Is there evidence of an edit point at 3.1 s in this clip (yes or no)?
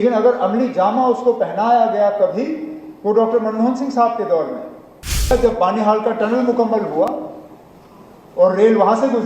no